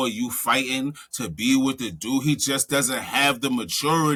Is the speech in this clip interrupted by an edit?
no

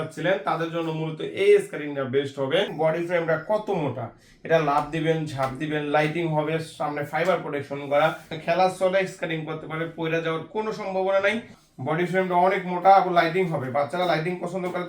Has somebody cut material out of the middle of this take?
yes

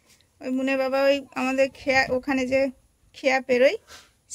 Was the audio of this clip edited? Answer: no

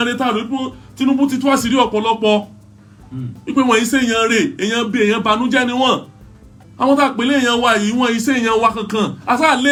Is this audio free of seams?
yes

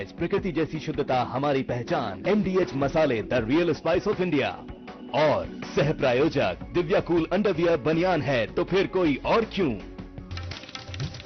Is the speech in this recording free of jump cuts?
no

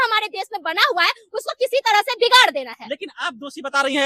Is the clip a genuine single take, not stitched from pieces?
yes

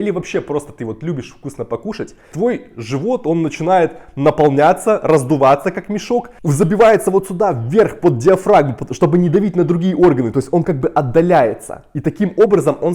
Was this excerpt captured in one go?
no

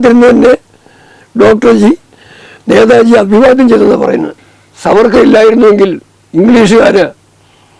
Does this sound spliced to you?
yes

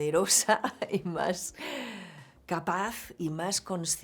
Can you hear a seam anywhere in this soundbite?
yes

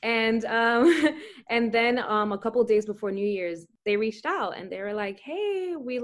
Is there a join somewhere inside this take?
yes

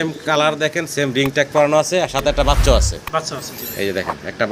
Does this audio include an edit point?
no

